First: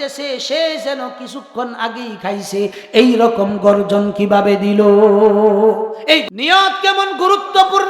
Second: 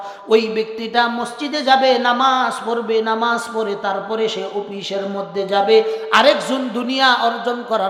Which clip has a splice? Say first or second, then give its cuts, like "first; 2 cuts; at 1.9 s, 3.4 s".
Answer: first; 1 cut; at 6.2 s